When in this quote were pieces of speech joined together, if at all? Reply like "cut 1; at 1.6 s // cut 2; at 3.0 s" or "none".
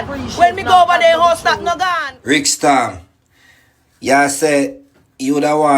cut 1; at 1.9 s